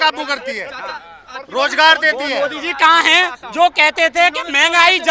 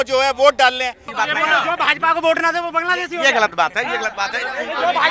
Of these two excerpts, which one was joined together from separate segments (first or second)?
second